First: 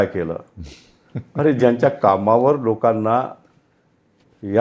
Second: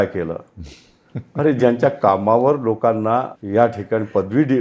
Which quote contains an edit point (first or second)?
second